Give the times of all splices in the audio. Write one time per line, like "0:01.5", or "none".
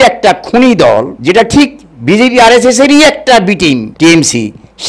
0:01.1
0:03.9